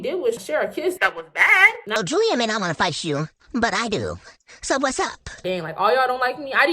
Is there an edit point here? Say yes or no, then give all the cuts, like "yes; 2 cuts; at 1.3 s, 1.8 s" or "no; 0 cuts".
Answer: yes; 2 cuts; at 2.0 s, 5.4 s